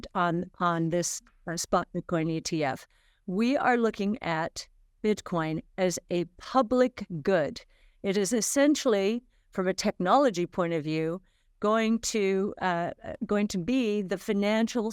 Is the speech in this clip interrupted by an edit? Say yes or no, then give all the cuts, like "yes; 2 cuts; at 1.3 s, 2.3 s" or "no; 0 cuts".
no; 0 cuts